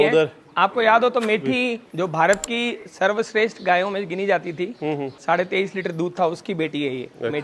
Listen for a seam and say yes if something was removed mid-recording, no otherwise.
yes